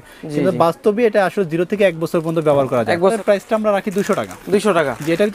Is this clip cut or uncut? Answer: cut